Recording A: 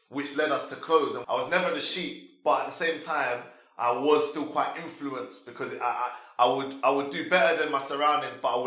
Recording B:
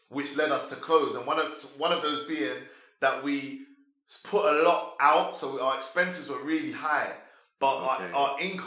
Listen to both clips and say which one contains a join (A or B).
A